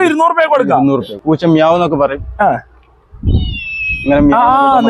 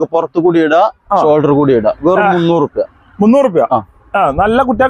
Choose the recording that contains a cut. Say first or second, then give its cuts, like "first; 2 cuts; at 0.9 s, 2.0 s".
first; 1 cut; at 1.1 s